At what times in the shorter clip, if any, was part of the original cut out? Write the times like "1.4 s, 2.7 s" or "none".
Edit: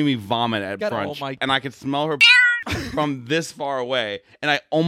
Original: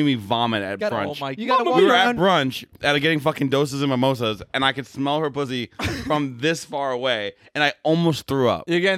1.3 s